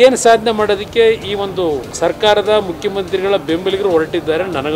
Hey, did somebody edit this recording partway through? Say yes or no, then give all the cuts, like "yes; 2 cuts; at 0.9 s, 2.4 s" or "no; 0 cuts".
yes; 1 cut; at 1.9 s